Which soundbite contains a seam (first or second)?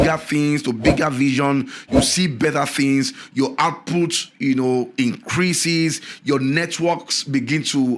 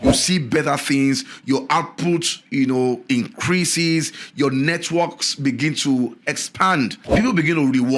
second